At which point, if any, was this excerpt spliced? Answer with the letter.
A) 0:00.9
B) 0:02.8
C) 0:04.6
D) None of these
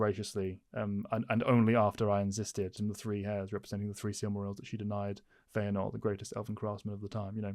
B